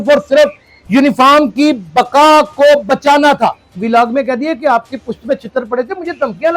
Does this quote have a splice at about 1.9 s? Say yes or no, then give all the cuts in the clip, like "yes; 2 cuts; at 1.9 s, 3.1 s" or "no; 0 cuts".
no; 1 cut; at 3.7 s